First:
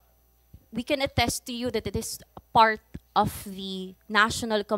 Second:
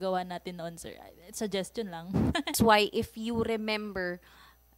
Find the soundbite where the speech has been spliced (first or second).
second